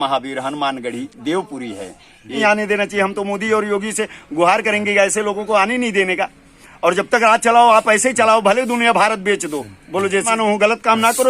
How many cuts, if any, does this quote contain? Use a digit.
2